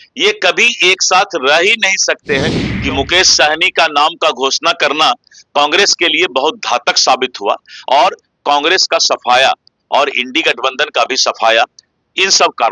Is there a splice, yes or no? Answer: yes